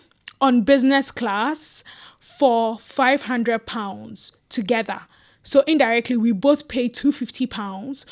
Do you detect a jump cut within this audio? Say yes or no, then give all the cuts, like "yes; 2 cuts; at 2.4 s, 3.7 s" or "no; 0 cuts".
no; 0 cuts